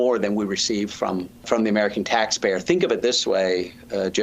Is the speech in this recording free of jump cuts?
no; 1 cut; at 1.4 s

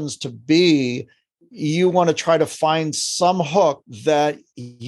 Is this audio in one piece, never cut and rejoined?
yes; 0 cuts

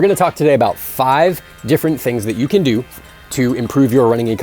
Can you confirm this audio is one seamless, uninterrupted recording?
yes; 0 cuts

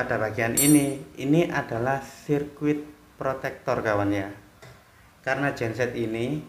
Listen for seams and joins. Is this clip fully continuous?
yes; 0 cuts

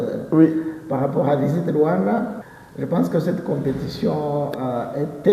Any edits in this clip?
yes; 1 cut; at 2.4 s

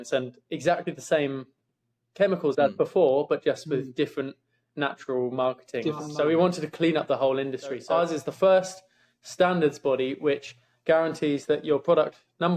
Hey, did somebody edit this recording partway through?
yes; 2 cuts; at 6.1 s, 7.8 s

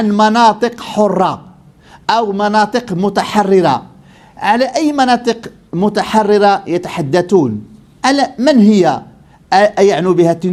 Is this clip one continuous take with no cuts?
yes; 0 cuts

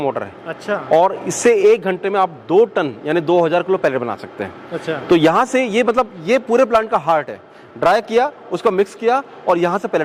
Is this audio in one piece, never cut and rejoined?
yes; 0 cuts

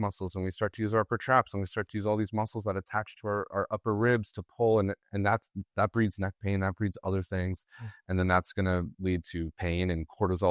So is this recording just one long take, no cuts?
yes; 0 cuts

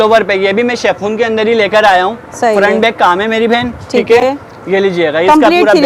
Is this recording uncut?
yes; 0 cuts

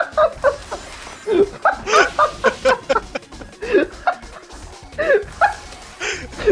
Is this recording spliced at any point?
no; 0 cuts

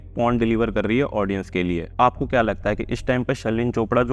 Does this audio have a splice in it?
yes; 1 cut; at 1.9 s

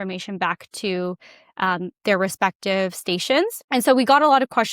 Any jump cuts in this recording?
yes; 1 cut; at 3.6 s

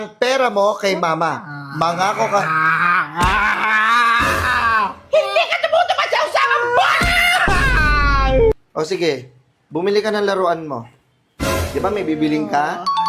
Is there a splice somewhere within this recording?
yes; 1 cut; at 8.5 s

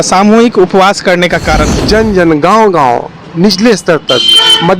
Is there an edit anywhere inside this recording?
yes; 1 cut; at 1.7 s

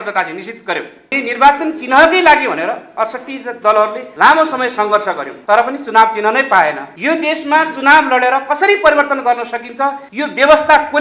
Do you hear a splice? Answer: yes; 5 cuts; at 1.2 s, 4.0 s, 5.3 s, 6.9 s, 10.1 s

